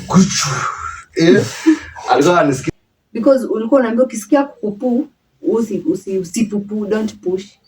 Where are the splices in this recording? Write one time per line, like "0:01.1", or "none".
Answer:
0:02.6